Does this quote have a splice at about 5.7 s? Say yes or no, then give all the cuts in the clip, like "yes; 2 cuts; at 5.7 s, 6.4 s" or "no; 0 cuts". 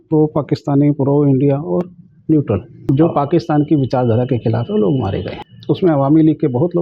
no; 1 cut; at 2.7 s